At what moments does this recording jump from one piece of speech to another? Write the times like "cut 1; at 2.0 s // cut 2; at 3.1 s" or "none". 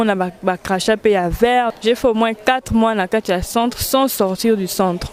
cut 1; at 1.7 s